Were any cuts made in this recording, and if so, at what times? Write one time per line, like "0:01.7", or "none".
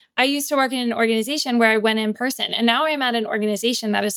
none